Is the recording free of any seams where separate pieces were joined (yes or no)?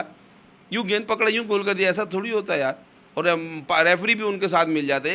yes